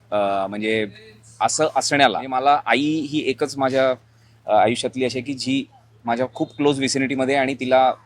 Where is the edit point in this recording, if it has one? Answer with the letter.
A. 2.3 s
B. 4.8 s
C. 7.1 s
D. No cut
A